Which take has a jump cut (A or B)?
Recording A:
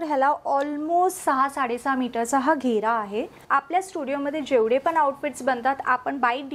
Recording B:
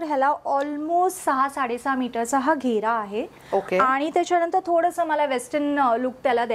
A